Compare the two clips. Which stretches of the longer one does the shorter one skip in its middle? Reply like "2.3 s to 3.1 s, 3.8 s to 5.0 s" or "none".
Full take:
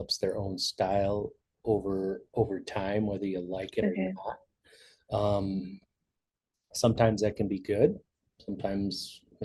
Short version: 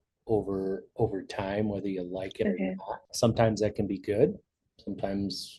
4.4 s to 6.6 s